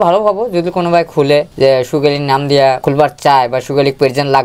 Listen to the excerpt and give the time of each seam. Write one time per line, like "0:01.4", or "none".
0:01.5
0:02.8

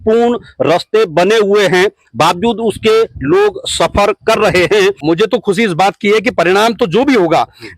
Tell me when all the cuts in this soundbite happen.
0:05.0

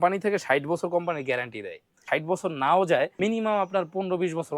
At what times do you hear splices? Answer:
0:02.0
0:03.1

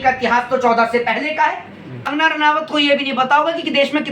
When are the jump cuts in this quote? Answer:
0:02.1

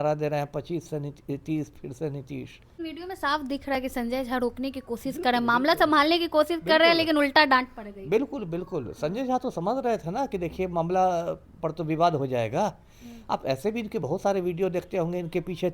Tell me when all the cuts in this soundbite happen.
0:02.8

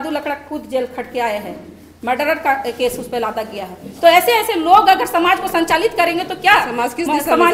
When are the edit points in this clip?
none

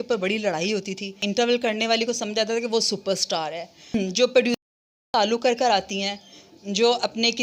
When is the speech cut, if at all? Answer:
0:01.2
0:03.9

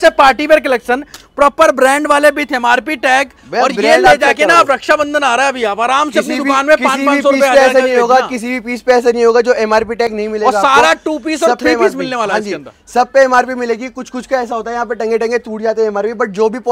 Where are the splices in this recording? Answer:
none

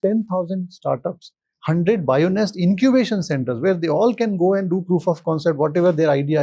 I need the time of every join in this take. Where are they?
none

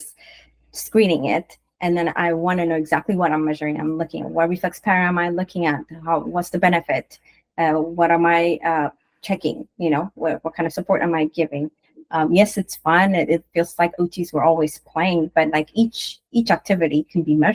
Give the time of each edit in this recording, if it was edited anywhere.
none

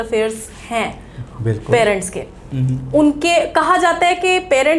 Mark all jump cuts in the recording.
none

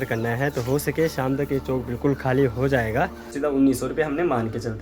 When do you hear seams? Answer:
0:03.3

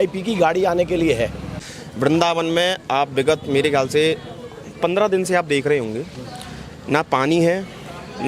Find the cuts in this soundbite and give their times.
0:01.5

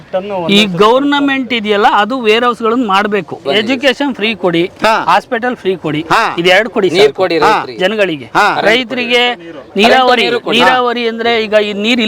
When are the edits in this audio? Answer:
0:03.4

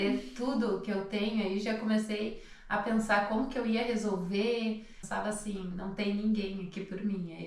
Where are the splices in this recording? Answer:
0:05.0

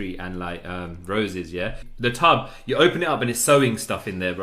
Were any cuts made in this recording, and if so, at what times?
0:02.2

